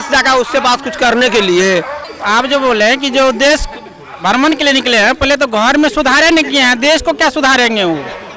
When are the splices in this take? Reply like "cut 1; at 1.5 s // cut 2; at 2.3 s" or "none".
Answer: none

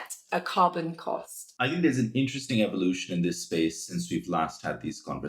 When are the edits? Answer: cut 1; at 1.5 s

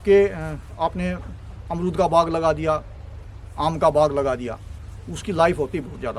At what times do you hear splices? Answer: none

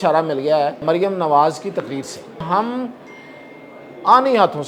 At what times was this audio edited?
cut 1; at 0.8 s // cut 2; at 2.4 s

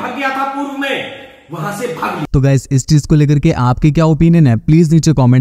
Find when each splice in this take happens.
none

